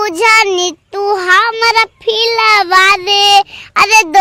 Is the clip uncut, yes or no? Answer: yes